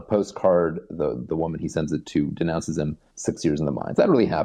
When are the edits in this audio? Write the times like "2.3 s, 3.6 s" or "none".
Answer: 3.1 s